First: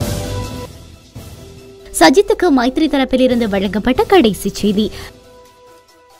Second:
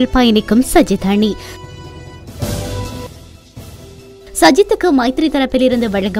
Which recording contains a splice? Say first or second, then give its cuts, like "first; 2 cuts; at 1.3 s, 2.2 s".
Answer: first; 1 cut; at 4.9 s